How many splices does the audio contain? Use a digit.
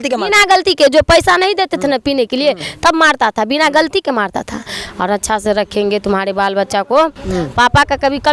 1